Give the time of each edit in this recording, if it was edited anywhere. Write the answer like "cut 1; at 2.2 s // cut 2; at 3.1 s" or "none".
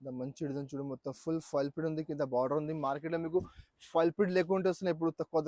none